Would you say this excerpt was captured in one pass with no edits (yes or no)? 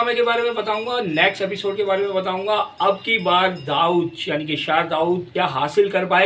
no